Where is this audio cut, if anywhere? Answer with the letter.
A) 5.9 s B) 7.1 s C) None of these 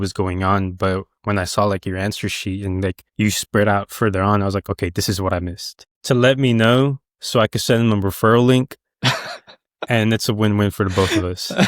A